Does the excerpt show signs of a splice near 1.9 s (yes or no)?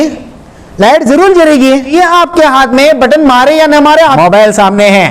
yes